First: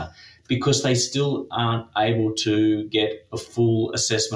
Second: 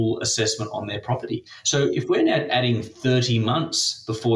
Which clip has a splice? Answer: second; 1 cut; at 1.5 s

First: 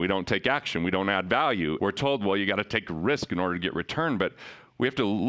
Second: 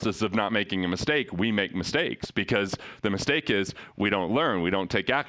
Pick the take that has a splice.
first; 1 cut; at 1.8 s

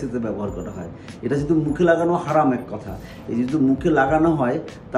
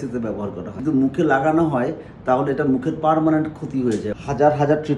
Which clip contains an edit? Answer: second; 2 cuts; at 0.8 s, 4.1 s

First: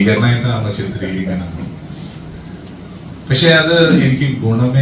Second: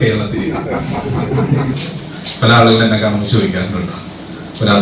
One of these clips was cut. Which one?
second; 1 cut; at 1.8 s

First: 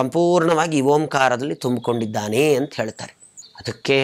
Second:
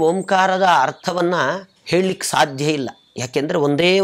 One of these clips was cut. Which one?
second; 1 cut; at 1.7 s

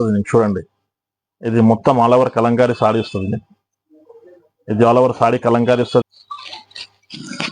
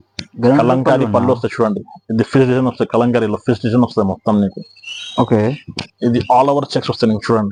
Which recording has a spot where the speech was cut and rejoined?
first; 1 cut; at 6.0 s

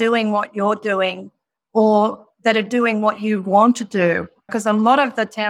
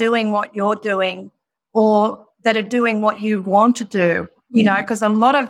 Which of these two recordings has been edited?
first; 1 cut; at 4.4 s

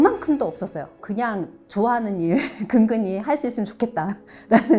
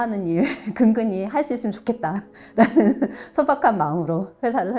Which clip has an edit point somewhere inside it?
first; 1 cut; at 1.0 s

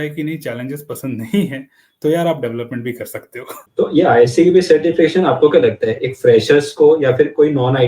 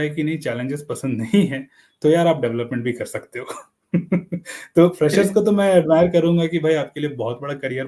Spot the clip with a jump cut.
first; 1 cut; at 3.6 s

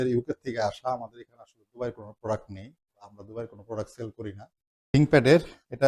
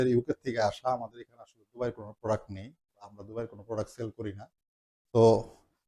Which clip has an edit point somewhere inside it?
first; 1 cut; at 4.9 s

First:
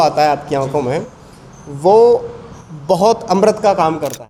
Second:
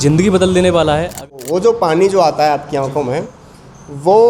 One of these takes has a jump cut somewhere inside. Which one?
second; 1 cut; at 1.3 s

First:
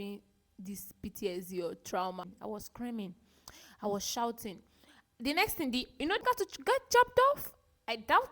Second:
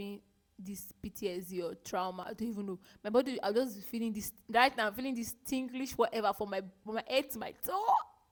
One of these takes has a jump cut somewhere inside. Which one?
first; 2 cuts; at 2.3 s, 6.2 s

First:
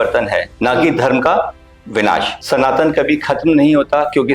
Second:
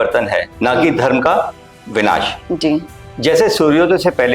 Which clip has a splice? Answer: first; 1 cut; at 2.3 s

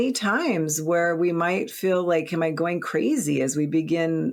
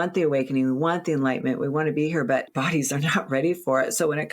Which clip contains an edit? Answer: second; 1 cut; at 2.5 s

